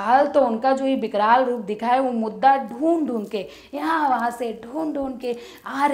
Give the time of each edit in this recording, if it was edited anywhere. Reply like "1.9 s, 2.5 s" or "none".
none